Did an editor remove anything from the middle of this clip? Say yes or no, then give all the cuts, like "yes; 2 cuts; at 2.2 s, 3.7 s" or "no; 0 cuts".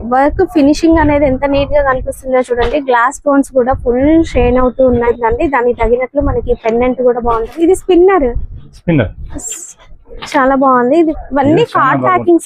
yes; 2 cuts; at 5.0 s, 11.1 s